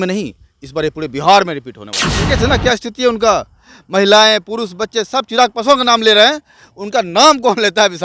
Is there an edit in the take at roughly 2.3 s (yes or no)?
yes